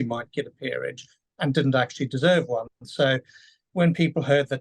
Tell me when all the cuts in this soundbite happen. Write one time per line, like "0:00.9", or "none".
none

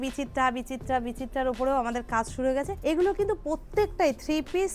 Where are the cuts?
0:02.7

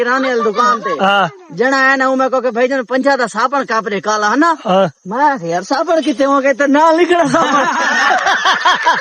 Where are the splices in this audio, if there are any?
none

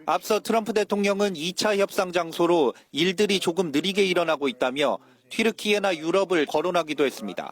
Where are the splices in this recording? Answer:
0:06.5

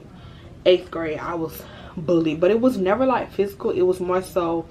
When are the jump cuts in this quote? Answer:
none

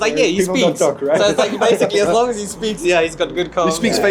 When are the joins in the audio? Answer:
none

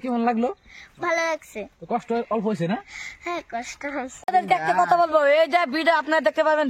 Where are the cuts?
0:04.3

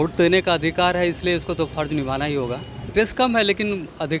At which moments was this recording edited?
0:02.8

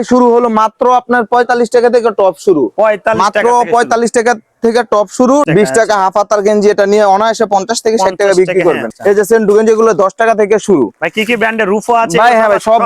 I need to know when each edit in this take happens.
0:05.5
0:08.9

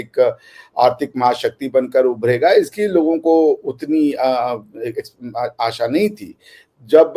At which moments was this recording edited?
none

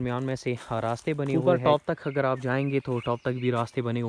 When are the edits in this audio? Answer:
0:01.3

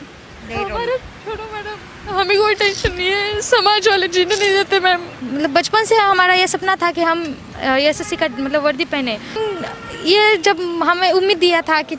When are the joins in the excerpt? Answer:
0:05.2
0:09.4

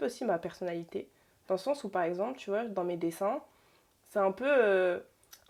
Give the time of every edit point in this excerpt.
none

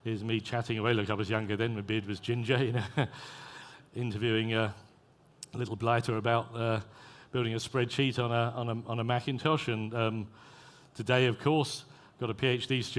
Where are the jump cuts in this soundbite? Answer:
0:06.3

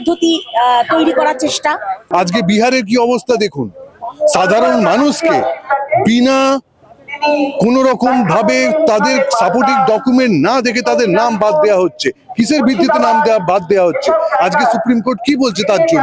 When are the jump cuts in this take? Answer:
0:02.1

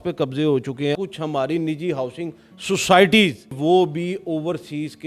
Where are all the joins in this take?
0:01.0
0:03.6

